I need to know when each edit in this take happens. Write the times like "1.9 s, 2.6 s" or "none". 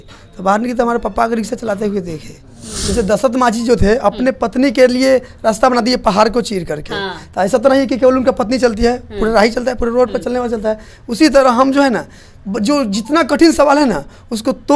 2.7 s